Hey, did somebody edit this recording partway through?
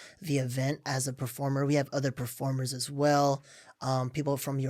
no; 0 cuts

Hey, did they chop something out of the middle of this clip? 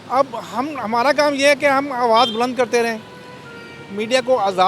no; 0 cuts

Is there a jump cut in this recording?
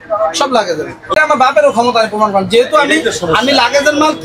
yes; 1 cut; at 1.1 s

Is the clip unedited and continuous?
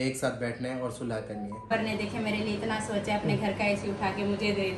no; 1 cut; at 1.7 s

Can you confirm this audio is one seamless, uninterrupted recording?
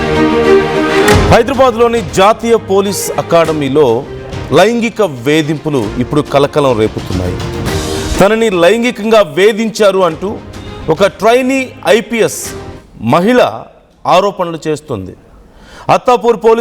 no; 1 cut; at 1.2 s

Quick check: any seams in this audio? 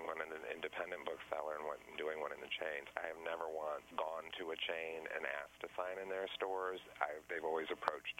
yes; 2 cuts; at 2.9 s, 3.9 s

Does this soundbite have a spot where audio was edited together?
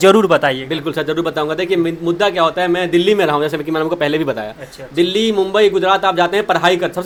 no; 0 cuts

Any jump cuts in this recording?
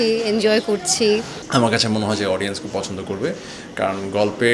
yes; 1 cut; at 1.4 s

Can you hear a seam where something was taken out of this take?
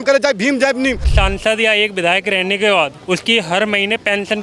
yes; 2 cuts; at 1.1 s, 3.0 s

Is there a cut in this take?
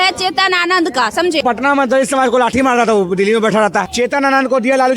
yes; 1 cut; at 1.4 s

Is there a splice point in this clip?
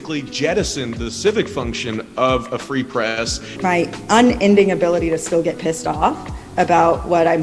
yes; 1 cut; at 3.5 s

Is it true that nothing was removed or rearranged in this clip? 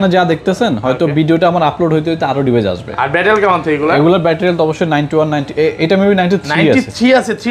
yes; 0 cuts

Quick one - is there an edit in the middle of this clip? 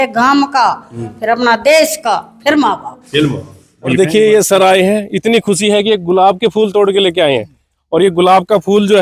yes; 1 cut; at 4.0 s

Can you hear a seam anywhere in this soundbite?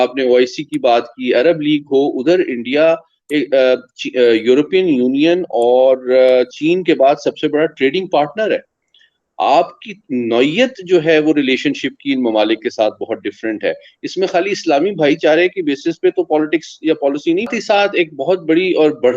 yes; 1 cut; at 17.5 s

